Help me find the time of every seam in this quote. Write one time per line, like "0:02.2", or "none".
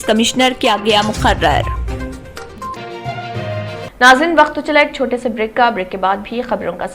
0:02.7